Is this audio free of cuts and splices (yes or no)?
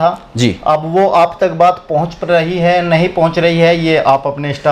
yes